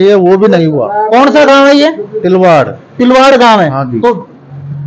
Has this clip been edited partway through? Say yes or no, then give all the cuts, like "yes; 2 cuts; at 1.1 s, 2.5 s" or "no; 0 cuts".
no; 0 cuts